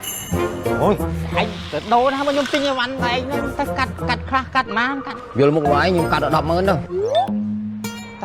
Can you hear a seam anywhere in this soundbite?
no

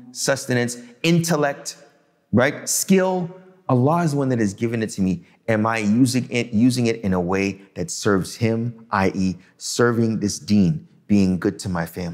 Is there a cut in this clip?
no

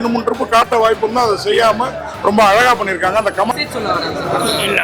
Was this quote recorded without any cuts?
no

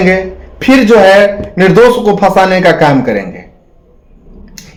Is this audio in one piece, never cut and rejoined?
yes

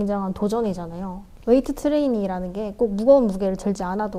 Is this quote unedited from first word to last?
no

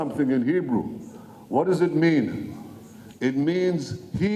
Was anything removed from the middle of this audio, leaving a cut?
no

